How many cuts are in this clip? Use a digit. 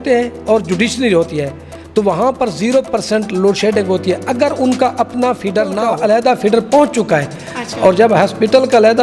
1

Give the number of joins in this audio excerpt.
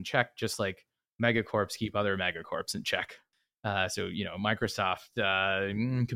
1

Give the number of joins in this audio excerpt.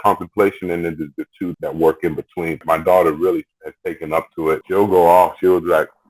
3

